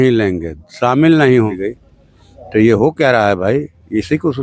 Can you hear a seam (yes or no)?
yes